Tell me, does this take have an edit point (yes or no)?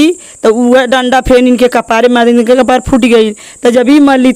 no